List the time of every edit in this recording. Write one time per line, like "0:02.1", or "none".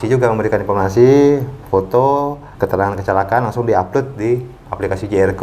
0:02.4

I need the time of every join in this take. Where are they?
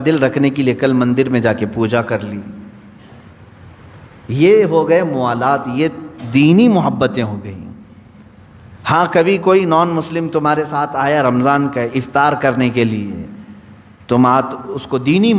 none

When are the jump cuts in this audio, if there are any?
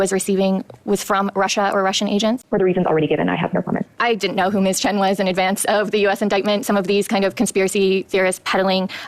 0:02.4
0:03.9

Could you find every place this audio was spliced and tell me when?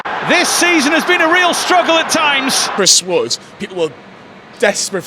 0:02.6

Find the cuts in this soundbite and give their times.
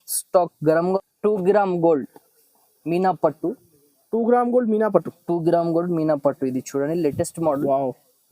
0:01.0

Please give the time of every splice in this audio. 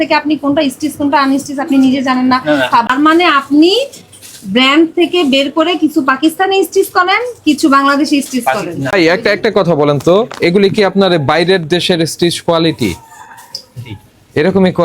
0:02.9
0:08.9

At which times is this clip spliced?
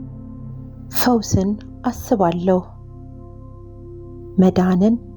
0:01.0

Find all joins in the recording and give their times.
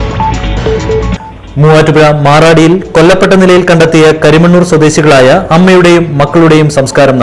none

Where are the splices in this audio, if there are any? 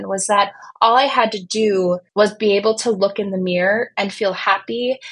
0:02.0

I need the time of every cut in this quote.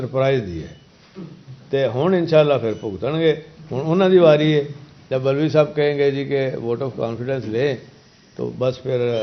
none

